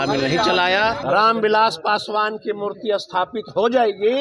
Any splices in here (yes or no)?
yes